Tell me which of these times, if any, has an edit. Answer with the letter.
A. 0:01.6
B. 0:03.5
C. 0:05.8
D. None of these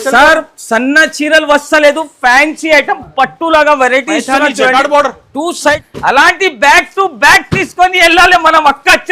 C